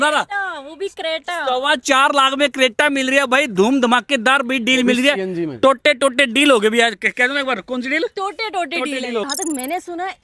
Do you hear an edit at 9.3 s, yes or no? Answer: yes